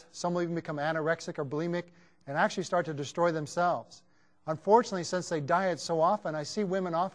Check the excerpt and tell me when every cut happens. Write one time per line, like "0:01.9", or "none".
0:01.0